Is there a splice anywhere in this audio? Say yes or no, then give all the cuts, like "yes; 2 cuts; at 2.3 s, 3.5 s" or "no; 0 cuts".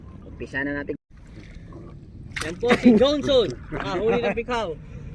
yes; 1 cut; at 1.0 s